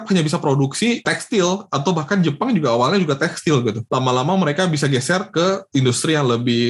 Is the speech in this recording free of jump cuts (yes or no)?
yes